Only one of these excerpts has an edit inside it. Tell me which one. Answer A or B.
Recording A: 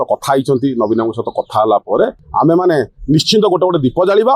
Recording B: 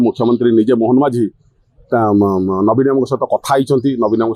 A